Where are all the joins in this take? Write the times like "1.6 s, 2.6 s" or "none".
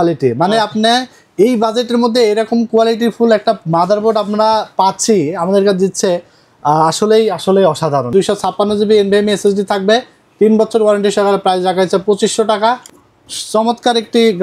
8.1 s, 12.8 s

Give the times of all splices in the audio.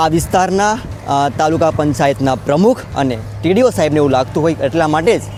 none

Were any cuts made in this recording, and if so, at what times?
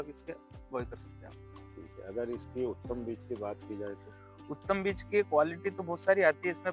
none

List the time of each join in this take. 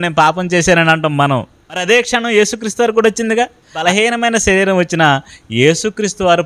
1.8 s, 3.8 s

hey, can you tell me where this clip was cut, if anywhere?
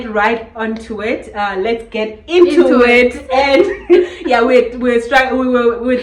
none

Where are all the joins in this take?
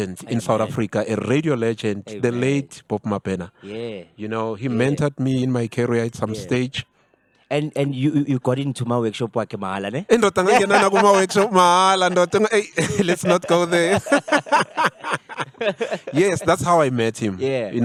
none

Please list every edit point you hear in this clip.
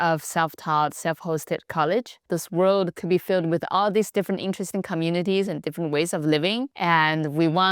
2.2 s, 6.7 s

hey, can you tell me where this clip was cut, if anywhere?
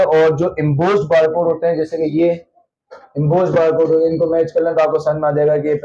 none

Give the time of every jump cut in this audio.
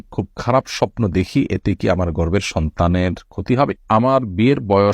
3.8 s

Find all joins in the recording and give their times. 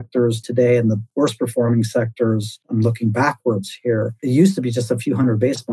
1.1 s, 2.6 s, 4.2 s

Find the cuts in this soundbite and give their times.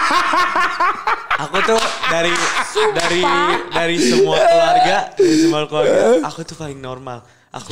none

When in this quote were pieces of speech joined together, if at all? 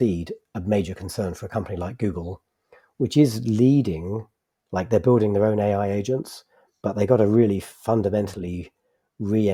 none

